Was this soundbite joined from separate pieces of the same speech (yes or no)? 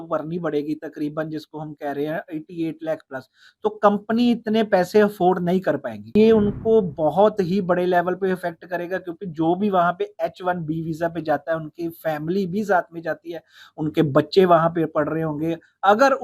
yes